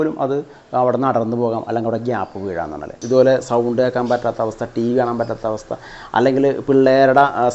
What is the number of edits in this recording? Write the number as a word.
one